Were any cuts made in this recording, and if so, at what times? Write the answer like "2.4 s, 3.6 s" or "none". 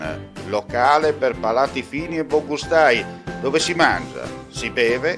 none